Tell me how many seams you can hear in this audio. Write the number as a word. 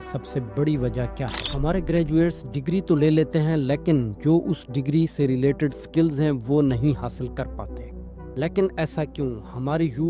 one